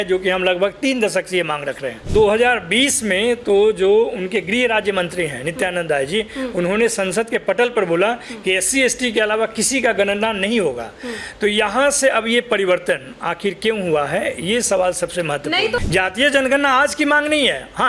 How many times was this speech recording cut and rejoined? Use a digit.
2